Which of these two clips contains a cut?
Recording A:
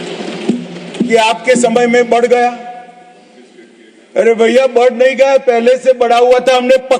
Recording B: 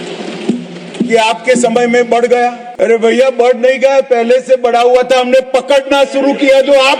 B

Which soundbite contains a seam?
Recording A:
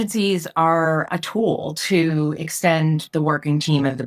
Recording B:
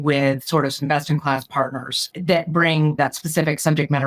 B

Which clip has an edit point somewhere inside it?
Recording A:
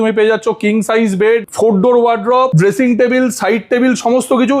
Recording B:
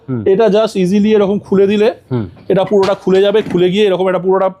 A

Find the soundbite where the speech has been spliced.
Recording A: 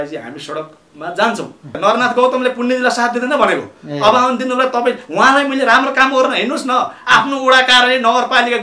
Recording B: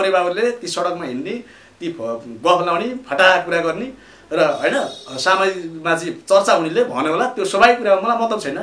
A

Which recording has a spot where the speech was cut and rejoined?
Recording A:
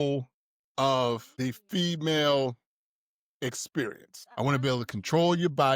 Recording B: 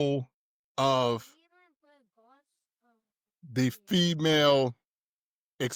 A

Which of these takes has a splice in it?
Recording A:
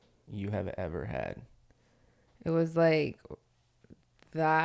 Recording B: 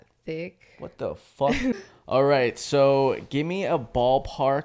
B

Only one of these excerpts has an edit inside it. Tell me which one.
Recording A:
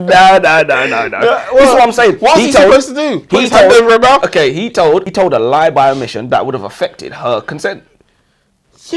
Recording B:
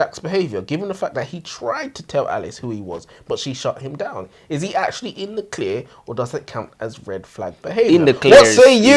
A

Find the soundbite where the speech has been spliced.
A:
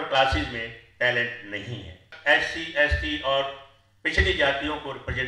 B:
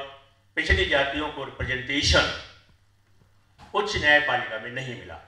A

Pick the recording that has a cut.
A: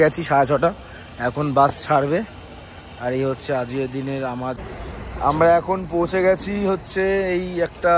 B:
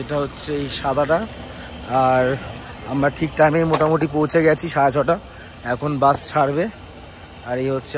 A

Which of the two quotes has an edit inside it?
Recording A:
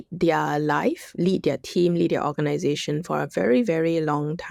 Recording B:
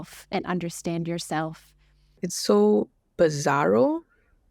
B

